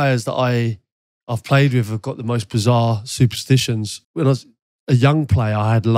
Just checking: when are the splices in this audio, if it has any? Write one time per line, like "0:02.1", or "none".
none